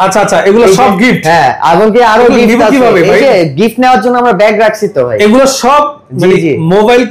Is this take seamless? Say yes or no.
yes